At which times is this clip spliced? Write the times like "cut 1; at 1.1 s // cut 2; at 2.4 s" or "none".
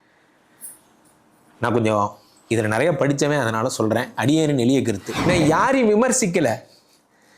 cut 1; at 5.1 s